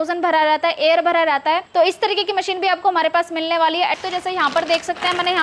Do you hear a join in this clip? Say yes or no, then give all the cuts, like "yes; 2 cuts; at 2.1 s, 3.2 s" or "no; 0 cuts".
yes; 2 cuts; at 1.7 s, 4.0 s